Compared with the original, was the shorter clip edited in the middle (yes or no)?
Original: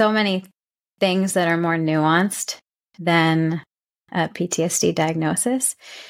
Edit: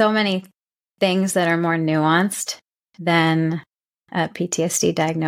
no